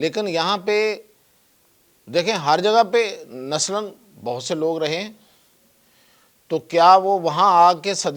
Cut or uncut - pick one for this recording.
uncut